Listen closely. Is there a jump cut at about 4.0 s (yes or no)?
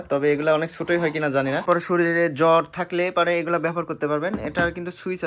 no